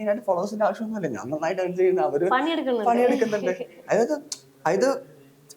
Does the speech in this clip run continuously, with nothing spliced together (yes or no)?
yes